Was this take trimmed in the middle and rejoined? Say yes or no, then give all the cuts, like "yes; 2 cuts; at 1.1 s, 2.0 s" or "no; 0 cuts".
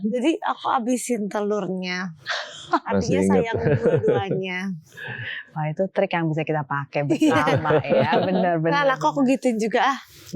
no; 0 cuts